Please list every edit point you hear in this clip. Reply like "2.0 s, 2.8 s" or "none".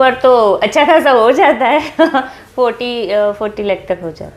none